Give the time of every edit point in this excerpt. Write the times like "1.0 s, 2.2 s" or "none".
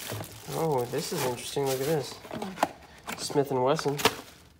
none